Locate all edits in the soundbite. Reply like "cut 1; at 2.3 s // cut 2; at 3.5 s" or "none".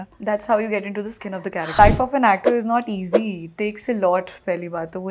cut 1; at 1.8 s